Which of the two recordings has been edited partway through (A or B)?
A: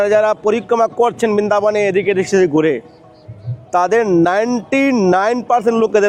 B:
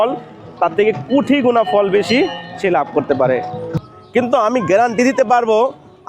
B